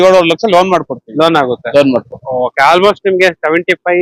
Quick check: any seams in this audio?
no; 0 cuts

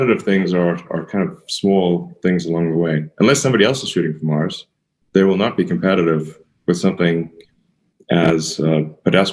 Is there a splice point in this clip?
no; 0 cuts

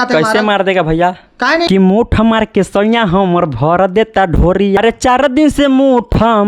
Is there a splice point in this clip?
yes; 2 cuts; at 1.7 s, 4.8 s

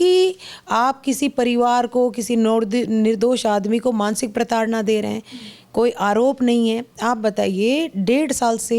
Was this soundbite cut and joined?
no; 0 cuts

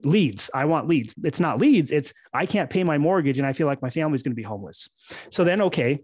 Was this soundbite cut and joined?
yes; 1 cut; at 1.1 s

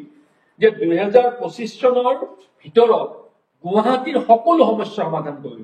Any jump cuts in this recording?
no; 0 cuts

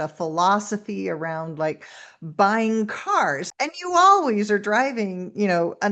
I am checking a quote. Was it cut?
yes; 1 cut; at 3.4 s

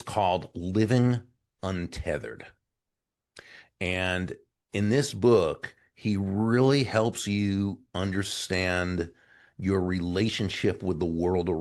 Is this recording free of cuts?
yes; 0 cuts

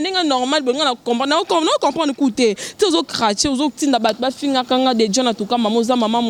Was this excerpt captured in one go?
yes; 0 cuts

